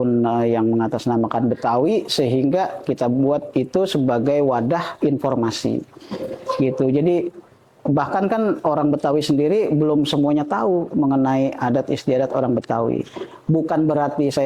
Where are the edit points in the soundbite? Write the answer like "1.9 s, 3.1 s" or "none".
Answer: none